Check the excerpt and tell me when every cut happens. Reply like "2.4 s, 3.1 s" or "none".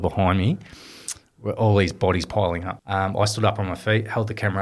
2.7 s

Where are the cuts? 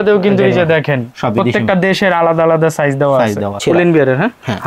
3.6 s

